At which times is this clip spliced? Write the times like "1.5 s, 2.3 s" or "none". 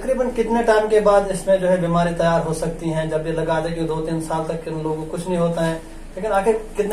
none